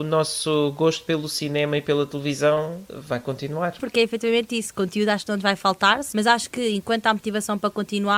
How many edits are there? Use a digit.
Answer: 3